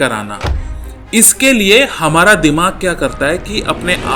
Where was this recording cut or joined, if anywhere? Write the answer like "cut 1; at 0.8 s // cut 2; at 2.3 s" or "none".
none